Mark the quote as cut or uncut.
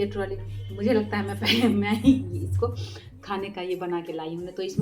uncut